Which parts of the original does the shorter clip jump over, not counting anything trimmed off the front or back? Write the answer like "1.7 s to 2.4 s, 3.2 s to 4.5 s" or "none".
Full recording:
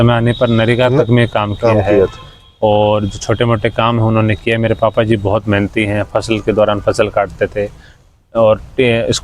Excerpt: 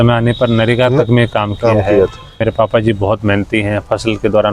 2.4 s to 4.6 s